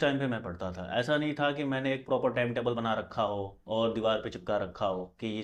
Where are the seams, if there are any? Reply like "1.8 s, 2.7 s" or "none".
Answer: none